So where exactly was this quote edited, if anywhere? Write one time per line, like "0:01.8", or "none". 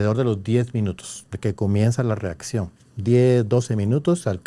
none

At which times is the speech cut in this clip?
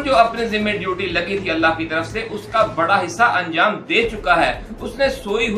none

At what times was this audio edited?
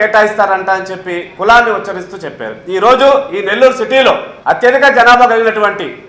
0:04.3

